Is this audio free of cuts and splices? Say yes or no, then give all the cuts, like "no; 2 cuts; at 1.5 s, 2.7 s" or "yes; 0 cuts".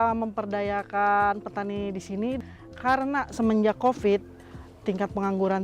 no; 1 cut; at 2.4 s